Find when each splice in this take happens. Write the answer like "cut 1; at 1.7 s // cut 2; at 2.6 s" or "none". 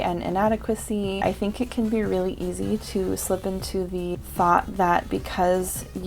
cut 1; at 1.2 s // cut 2; at 4.2 s